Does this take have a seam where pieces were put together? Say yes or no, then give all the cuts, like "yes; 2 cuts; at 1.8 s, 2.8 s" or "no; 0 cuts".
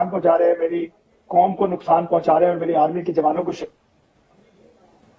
no; 0 cuts